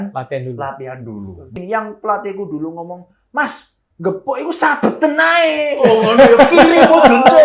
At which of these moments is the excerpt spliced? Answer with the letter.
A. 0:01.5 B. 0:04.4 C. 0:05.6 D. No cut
A